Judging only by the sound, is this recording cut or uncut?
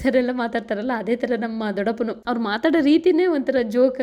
cut